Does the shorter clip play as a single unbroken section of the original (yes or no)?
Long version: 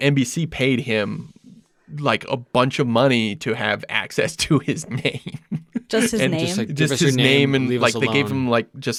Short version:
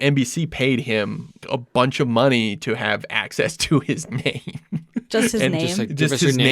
no